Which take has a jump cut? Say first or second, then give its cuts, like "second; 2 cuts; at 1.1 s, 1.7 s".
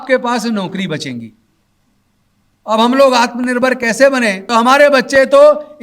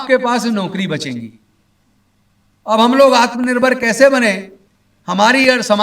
first; 1 cut; at 4.4 s